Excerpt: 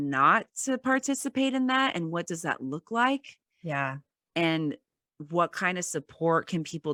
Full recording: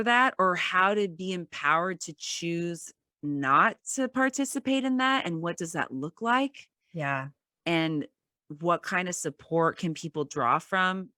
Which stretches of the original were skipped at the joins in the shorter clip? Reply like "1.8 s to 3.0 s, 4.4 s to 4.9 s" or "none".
none